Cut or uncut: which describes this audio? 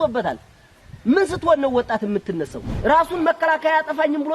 cut